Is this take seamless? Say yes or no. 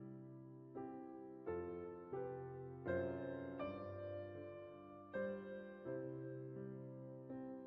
yes